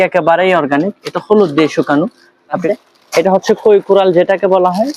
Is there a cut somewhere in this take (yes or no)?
yes